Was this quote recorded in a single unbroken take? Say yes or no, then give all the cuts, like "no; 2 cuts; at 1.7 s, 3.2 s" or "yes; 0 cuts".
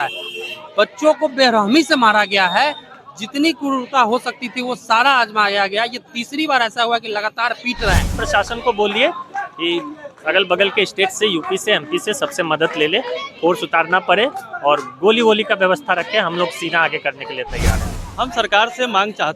no; 2 cuts; at 8.2 s, 17.8 s